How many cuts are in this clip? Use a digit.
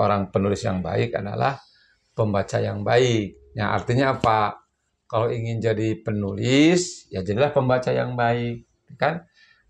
0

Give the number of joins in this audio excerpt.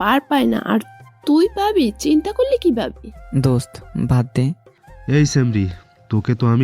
1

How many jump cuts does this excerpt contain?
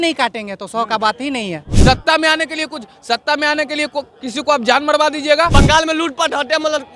2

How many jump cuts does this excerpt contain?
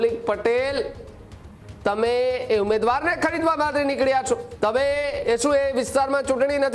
1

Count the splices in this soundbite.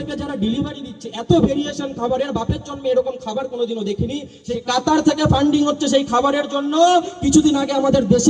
1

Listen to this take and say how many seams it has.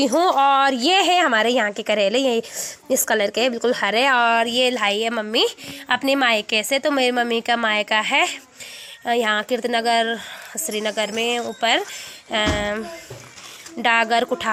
0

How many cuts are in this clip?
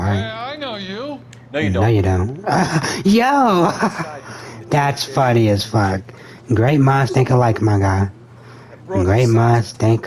0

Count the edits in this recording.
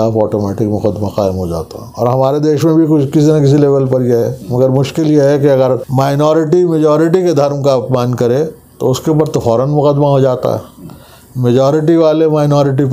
1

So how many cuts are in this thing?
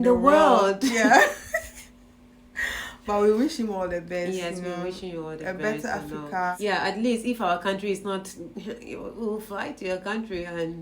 1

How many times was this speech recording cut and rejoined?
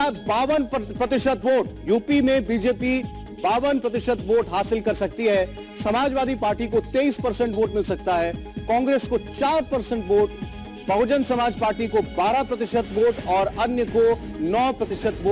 2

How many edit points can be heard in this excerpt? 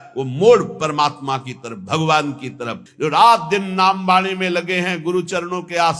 1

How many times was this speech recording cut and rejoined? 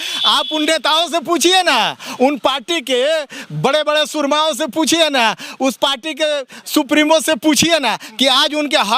0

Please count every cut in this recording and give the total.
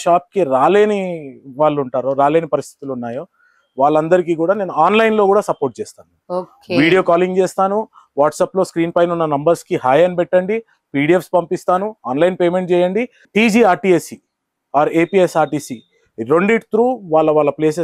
0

